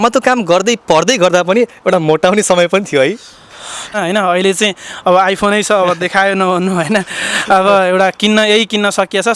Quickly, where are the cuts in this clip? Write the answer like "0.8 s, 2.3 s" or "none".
3.9 s